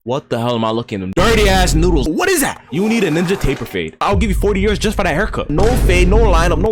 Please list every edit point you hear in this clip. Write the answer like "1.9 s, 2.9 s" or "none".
none